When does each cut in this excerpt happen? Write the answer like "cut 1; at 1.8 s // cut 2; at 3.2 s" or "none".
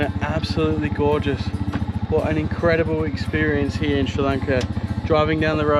none